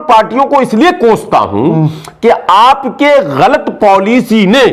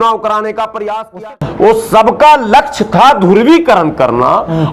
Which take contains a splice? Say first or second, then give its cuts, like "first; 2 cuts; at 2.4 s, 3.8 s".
second; 1 cut; at 1.4 s